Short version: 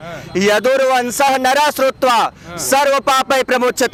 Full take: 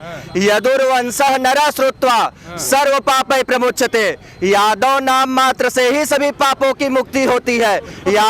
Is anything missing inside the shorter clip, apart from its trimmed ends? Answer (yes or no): no